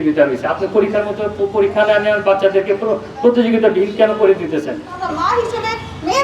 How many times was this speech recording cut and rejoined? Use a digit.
1